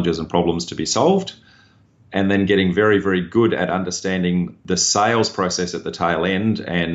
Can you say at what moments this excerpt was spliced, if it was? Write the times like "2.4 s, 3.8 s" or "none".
4.6 s

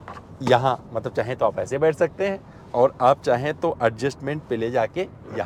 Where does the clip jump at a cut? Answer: none

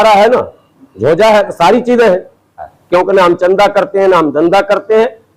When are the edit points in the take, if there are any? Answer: 2.7 s

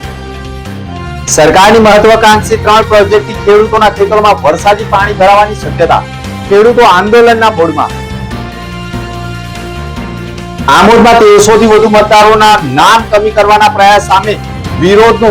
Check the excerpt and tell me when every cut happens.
1.3 s

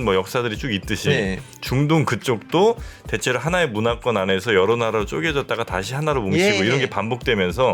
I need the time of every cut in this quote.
none

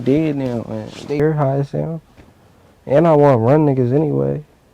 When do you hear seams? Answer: 1.2 s

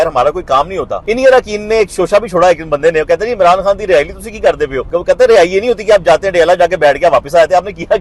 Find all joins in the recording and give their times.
1.0 s, 4.8 s

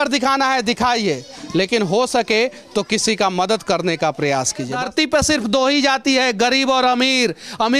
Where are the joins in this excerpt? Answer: 4.7 s

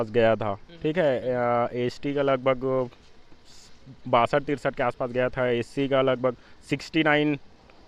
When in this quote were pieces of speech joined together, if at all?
none

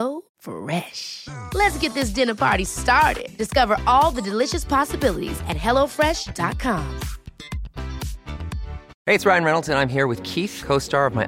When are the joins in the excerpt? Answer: 8.8 s

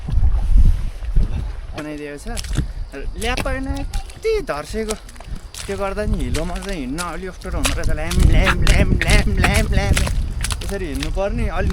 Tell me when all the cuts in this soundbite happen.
1.8 s

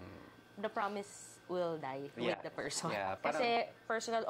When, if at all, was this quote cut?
3.2 s

